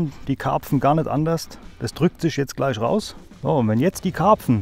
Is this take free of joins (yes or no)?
yes